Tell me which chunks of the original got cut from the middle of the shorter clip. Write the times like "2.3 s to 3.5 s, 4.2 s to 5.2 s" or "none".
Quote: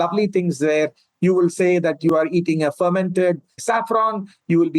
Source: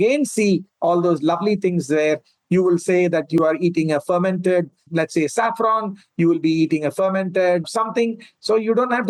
4.9 s to 5.3 s